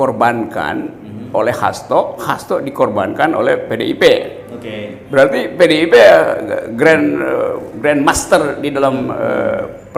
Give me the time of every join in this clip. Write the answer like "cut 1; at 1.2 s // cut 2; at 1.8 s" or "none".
none